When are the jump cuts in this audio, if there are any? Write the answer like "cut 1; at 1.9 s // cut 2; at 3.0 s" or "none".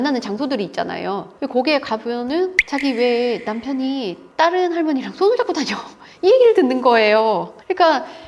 none